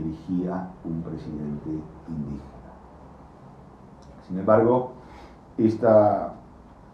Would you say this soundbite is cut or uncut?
cut